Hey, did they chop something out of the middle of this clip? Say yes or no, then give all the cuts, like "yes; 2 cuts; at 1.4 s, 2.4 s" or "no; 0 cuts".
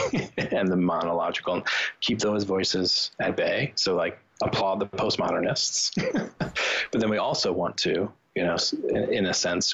no; 0 cuts